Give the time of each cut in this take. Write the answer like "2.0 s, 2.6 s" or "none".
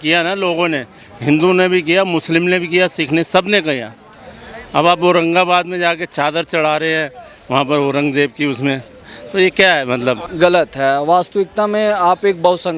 10.3 s

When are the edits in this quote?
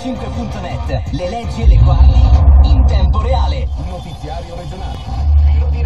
3.7 s

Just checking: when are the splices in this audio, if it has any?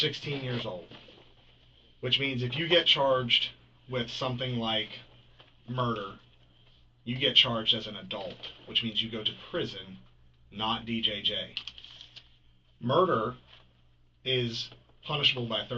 none

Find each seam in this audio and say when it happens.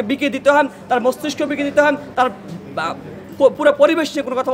none

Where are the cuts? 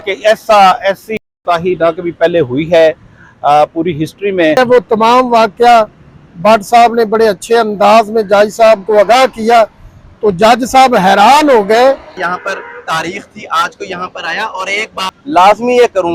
4.6 s, 12.2 s, 15.1 s

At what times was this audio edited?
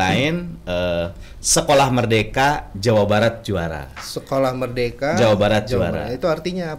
none

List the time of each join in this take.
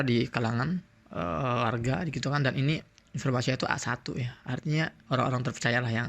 5.0 s

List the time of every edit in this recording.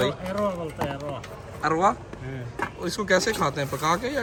none

